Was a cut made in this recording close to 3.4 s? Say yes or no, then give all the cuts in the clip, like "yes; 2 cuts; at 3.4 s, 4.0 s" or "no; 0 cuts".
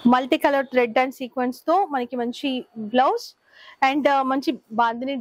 no; 0 cuts